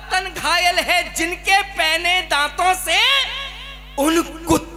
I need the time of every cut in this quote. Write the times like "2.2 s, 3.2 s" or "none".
none